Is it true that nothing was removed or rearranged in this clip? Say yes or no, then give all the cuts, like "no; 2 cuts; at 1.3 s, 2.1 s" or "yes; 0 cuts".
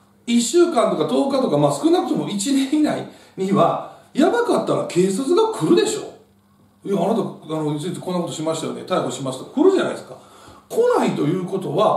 yes; 0 cuts